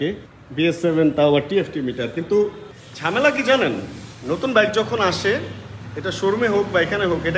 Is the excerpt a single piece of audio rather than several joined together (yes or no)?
yes